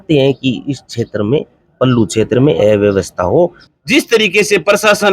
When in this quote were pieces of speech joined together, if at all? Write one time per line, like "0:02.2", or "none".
0:03.6